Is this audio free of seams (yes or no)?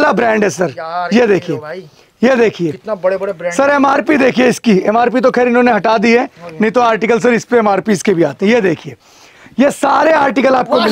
yes